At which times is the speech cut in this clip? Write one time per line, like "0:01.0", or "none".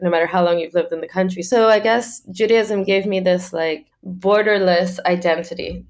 0:01.4